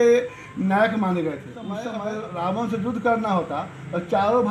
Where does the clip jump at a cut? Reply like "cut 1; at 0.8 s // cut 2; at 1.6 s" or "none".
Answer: cut 1; at 1.9 s